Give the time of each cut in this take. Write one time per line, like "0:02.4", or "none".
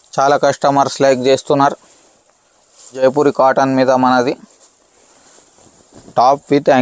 0:03.0